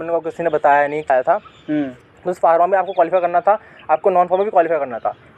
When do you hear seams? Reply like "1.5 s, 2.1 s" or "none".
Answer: 1.1 s